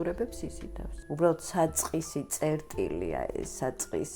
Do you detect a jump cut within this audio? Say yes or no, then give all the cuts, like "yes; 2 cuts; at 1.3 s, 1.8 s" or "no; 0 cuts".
yes; 1 cut; at 1.0 s